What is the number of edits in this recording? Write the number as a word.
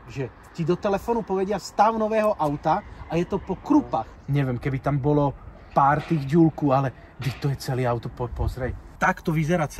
two